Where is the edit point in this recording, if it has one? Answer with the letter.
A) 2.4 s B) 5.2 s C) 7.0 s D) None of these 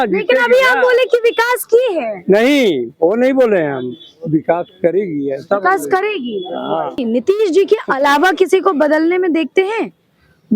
C